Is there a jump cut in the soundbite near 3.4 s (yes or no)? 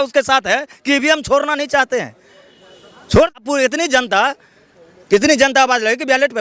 yes